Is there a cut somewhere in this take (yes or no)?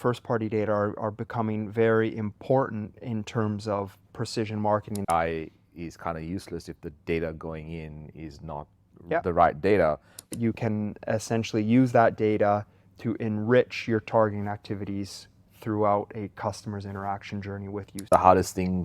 yes